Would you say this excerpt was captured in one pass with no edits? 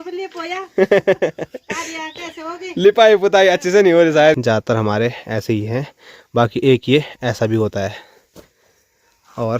no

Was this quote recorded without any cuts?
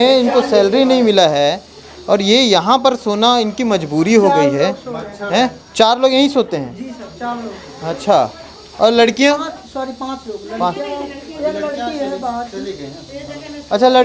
yes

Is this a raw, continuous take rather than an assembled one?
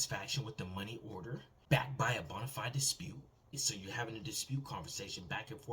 no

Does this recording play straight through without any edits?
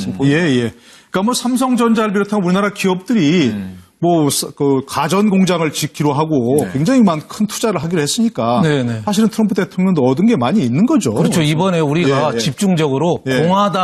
yes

